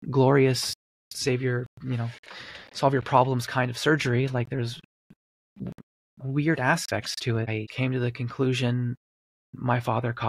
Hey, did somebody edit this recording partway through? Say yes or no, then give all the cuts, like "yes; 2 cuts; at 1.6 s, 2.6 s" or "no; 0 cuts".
yes; 1 cut; at 7.6 s